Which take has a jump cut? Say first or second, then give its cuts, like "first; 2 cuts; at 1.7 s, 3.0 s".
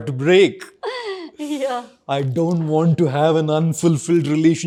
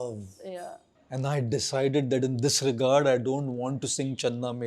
second; 1 cut; at 0.9 s